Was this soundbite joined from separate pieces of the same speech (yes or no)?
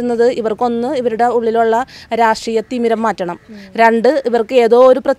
no